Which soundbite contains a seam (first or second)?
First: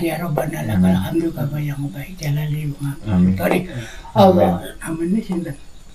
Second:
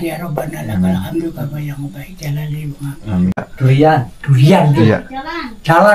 second